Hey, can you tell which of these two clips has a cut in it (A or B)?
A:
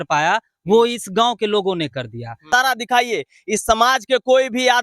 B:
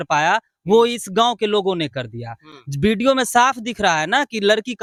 A